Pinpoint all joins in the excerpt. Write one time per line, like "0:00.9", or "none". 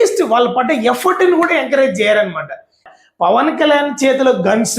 0:02.8